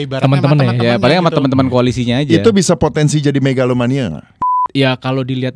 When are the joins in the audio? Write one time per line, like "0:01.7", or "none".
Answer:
0:04.3